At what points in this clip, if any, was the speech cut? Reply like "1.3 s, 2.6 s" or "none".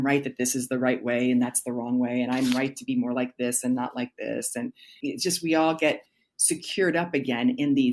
4.9 s